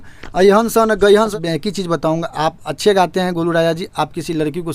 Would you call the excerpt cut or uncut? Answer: cut